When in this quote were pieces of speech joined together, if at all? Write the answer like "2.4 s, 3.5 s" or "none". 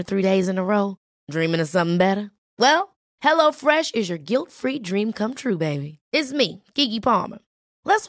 none